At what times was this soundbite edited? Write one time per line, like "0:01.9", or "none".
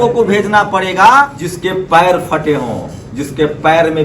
0:01.4